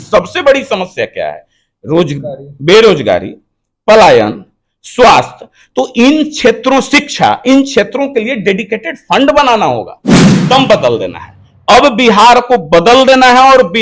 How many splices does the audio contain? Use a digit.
1